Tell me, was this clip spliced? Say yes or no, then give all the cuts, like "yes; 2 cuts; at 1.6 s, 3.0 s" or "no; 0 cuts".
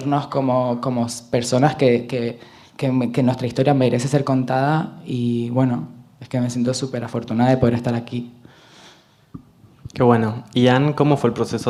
no; 0 cuts